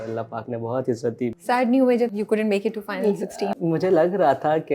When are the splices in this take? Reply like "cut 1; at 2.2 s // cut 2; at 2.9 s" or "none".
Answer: cut 1; at 1.3 s // cut 2; at 2.1 s // cut 3; at 3.5 s